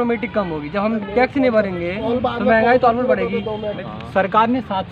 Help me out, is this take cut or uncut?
cut